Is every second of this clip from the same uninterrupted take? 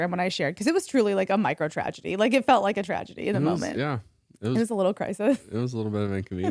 yes; 0 cuts

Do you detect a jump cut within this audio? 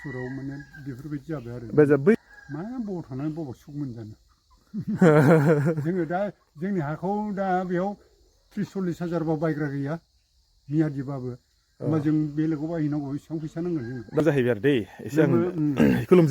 yes; 2 cuts; at 2.2 s, 14.2 s

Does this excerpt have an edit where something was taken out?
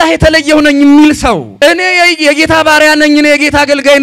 yes; 1 cut; at 1.5 s

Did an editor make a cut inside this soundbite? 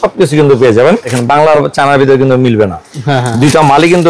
yes; 1 cut; at 1.2 s

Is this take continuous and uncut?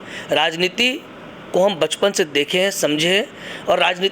yes; 0 cuts

